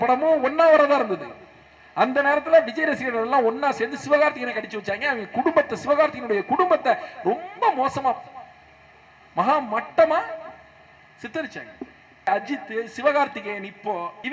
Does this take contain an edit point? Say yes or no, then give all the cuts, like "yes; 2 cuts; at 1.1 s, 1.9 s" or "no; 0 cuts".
yes; 1 cut; at 12.2 s